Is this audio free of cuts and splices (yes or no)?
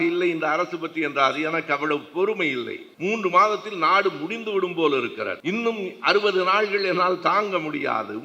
no